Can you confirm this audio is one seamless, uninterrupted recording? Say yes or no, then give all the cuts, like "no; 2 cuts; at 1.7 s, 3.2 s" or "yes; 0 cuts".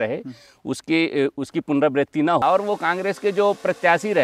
no; 1 cut; at 2.4 s